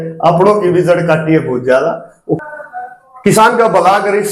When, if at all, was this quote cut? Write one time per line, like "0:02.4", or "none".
0:02.4